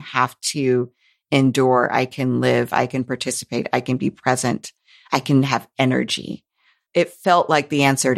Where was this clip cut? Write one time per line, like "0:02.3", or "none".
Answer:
0:06.8

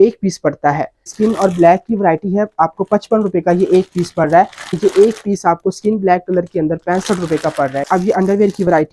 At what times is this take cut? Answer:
0:01.1
0:04.8
0:07.8

